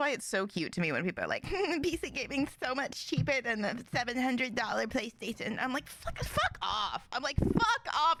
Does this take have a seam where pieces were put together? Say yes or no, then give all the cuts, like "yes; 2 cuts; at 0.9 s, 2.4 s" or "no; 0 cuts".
no; 0 cuts